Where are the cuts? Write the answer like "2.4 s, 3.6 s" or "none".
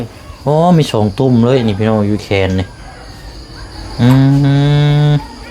none